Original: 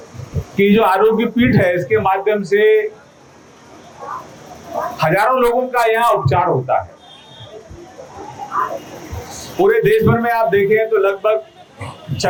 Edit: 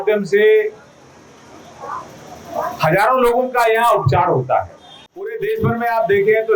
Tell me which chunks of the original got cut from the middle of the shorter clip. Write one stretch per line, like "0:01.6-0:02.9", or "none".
0:07.5-0:09.8